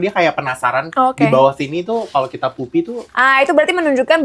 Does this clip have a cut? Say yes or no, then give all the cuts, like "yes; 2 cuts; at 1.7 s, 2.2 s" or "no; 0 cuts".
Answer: yes; 1 cut; at 3.2 s